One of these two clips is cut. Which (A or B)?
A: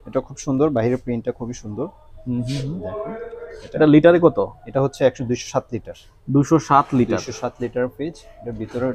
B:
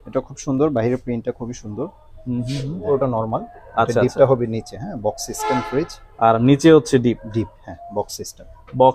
B